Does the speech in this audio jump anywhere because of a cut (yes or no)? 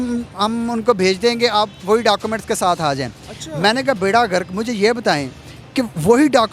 no